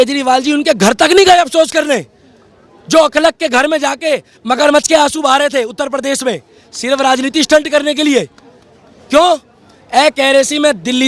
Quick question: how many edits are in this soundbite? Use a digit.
0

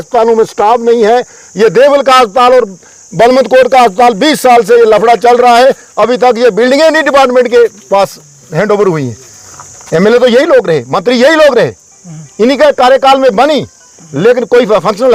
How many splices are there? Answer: 0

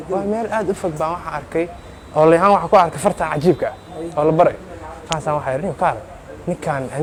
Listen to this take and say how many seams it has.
0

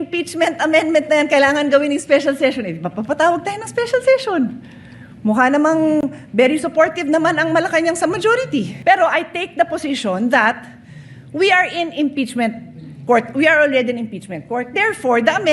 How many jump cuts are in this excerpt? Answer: 1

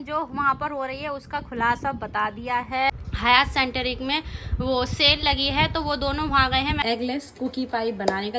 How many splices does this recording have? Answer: 2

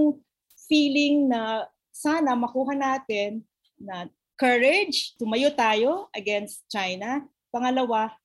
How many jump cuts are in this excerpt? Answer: 0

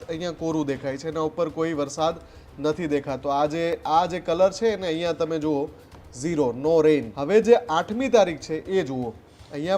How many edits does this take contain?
1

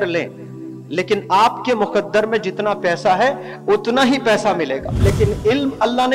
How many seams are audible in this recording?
1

